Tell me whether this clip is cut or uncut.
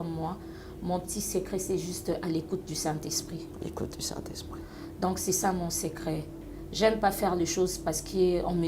uncut